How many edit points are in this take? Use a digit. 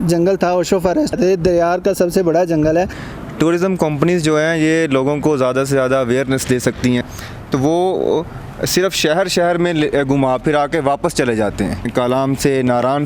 4